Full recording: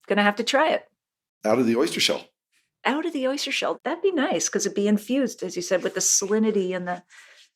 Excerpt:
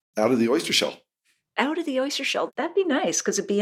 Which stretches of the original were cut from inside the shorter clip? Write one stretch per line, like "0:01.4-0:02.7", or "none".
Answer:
none